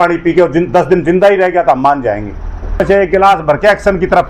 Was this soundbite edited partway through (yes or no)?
yes